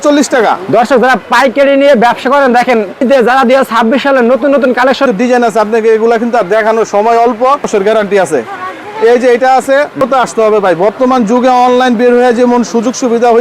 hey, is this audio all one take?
no; 4 cuts; at 3.0 s, 5.1 s, 7.6 s, 10.0 s

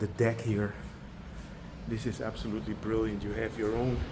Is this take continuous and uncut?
yes; 0 cuts

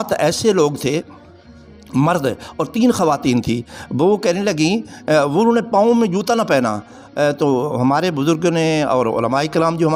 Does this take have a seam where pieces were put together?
no; 0 cuts

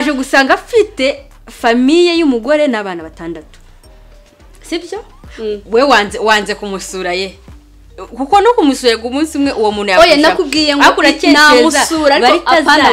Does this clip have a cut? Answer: no; 0 cuts

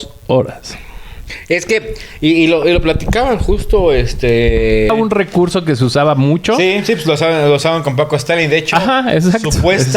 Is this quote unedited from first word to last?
no; 1 cut; at 4.9 s

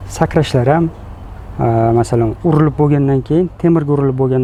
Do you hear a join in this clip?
no; 0 cuts

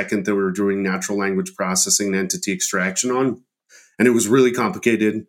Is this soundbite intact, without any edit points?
yes; 0 cuts

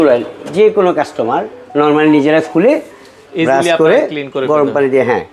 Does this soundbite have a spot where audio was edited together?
no; 0 cuts

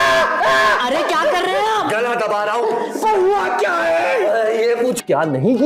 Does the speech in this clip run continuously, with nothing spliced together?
yes; 0 cuts

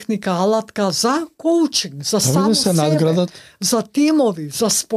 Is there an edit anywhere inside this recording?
no; 0 cuts

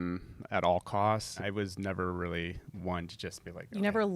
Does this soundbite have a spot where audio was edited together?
yes; 1 cut; at 1.4 s

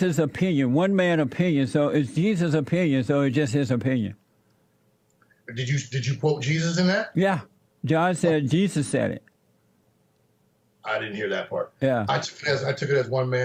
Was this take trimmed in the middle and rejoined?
no; 0 cuts

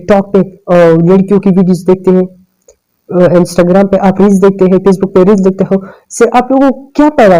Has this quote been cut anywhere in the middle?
no; 0 cuts

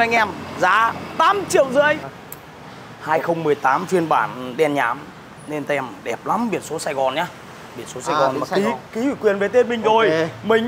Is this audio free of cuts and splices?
no; 1 cut; at 2.1 s

